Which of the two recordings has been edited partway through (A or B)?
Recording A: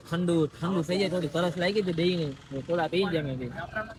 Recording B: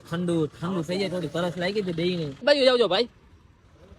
B